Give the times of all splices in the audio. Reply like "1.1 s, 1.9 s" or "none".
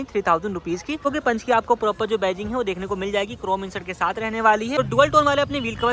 1.0 s, 4.8 s

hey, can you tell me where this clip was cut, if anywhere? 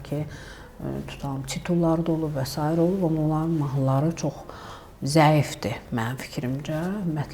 none

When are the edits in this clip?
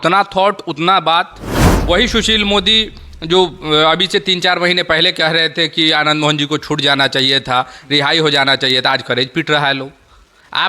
1.7 s

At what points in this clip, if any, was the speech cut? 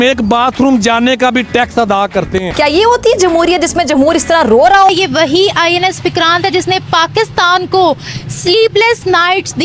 2.5 s, 4.9 s

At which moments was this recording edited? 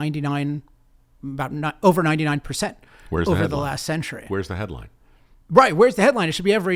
none

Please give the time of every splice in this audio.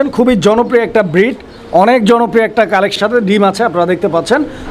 3.0 s

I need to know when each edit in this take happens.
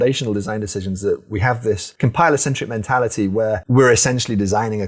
1.9 s, 3.6 s

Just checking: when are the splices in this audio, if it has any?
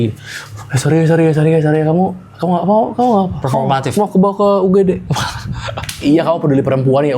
6.0 s

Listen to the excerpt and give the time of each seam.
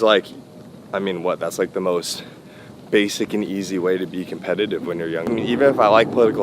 5.3 s

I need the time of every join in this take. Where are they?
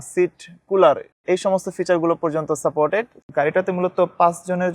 3.2 s

